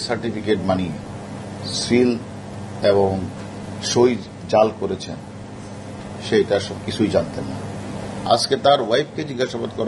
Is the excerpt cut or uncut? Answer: uncut